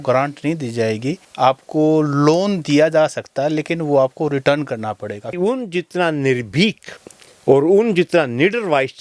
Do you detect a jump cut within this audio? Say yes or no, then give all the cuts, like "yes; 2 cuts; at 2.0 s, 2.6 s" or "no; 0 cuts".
yes; 1 cut; at 5.3 s